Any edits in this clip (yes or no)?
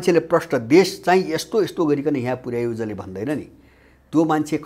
no